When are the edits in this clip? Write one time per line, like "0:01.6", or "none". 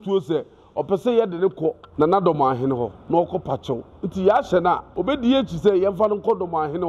0:01.8
0:03.0
0:04.9